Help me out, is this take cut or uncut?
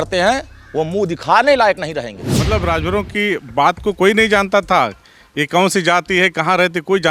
cut